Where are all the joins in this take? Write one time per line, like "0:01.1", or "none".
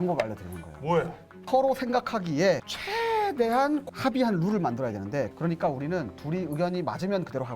0:01.5
0:03.9